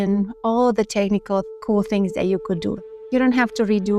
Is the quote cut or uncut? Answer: cut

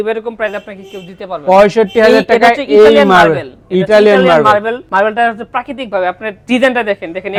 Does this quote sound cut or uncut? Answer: uncut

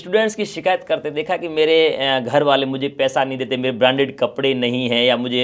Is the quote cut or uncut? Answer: uncut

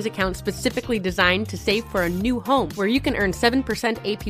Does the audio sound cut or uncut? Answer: uncut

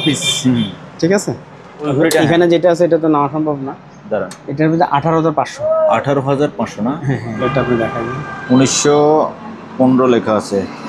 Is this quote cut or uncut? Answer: cut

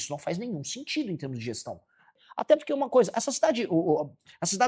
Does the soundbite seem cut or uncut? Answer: cut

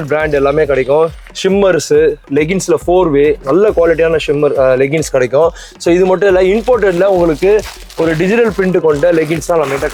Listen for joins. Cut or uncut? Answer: uncut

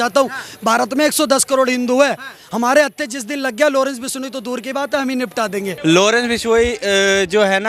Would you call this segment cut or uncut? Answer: cut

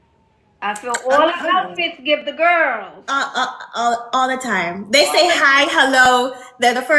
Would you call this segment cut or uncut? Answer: uncut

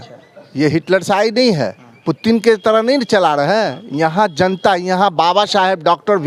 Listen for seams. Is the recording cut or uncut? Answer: uncut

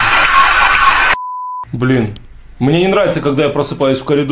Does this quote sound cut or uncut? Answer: cut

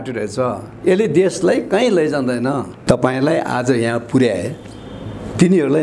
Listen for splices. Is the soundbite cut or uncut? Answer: cut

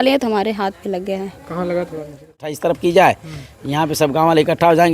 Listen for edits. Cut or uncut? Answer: cut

